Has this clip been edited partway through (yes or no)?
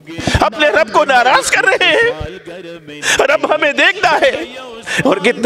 no